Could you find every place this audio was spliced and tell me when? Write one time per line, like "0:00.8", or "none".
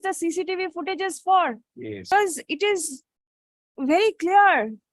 0:02.1